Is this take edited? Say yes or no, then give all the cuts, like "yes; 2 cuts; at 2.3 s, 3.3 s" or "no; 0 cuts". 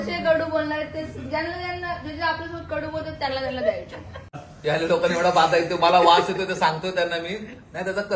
yes; 1 cut; at 4.5 s